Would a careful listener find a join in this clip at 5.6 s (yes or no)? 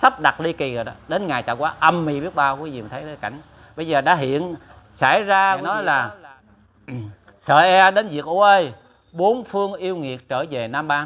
yes